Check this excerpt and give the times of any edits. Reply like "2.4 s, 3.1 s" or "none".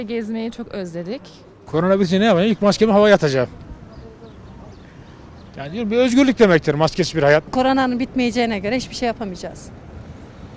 1.5 s, 7.5 s